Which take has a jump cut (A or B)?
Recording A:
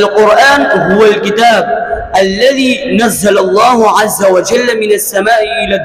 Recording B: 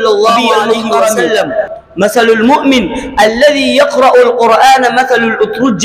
B